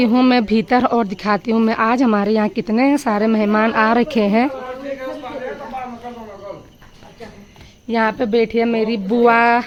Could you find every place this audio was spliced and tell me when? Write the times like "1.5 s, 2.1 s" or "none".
none

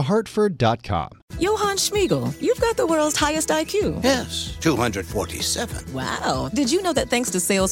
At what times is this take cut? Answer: 1.2 s

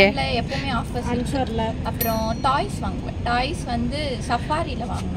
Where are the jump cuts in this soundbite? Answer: none

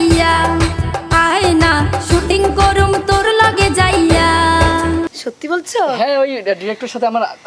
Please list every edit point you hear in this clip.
5.1 s

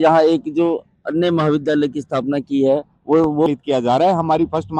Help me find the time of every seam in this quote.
3.5 s

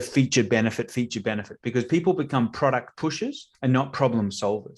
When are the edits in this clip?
3.4 s

